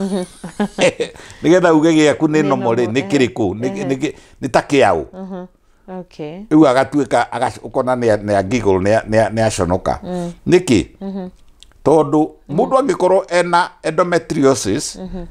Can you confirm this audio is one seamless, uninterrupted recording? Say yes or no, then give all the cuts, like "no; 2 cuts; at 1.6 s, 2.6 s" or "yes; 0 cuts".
yes; 0 cuts